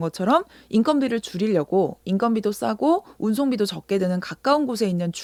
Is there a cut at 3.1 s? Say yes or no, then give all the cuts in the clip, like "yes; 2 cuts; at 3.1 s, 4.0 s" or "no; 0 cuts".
no; 0 cuts